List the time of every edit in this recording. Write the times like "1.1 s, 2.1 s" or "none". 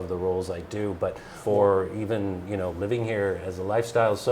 1.3 s